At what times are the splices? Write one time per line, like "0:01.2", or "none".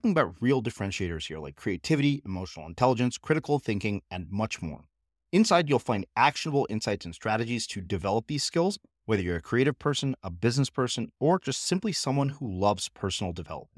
none